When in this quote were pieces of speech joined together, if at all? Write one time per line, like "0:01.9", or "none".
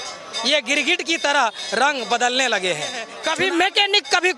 0:03.1